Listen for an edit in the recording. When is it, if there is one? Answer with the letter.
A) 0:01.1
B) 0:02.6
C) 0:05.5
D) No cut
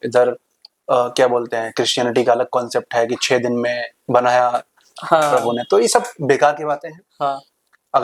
D